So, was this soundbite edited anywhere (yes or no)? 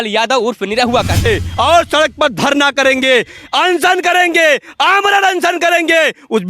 yes